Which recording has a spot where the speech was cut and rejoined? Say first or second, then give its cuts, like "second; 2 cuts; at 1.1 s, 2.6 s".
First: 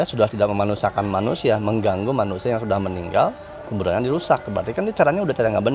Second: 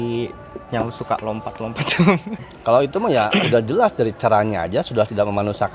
second; 1 cut; at 2.4 s